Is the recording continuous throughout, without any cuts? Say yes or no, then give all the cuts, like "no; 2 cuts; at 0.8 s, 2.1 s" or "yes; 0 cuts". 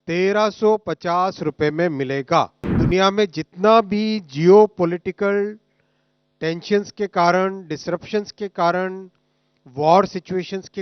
no; 1 cut; at 2.7 s